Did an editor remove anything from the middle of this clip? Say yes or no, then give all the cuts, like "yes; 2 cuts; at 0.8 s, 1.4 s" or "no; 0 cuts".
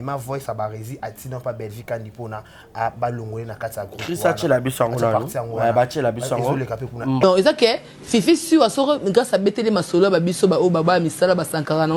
yes; 1 cut; at 7.2 s